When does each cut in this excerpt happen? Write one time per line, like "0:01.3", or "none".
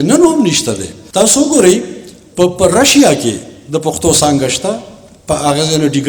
0:00.9

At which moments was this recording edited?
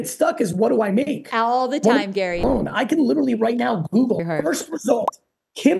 0:02.4
0:04.2

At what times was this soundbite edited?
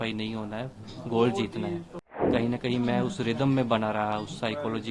0:02.3

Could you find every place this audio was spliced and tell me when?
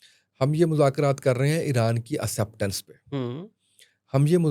none

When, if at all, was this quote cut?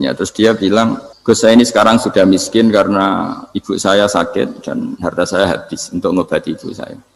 0:01.1

